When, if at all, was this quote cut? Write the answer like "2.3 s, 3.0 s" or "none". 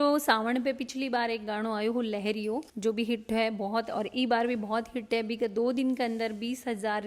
none